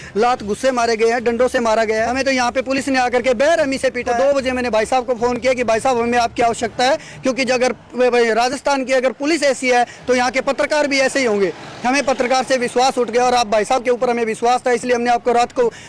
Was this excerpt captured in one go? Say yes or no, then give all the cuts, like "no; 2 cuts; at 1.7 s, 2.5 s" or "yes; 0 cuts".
no; 2 cuts; at 2.1 s, 4.1 s